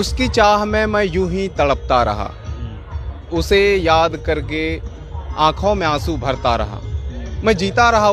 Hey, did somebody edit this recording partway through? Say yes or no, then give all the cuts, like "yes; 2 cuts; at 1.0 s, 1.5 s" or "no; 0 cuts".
no; 0 cuts